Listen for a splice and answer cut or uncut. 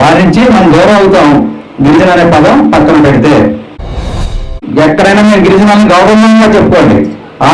cut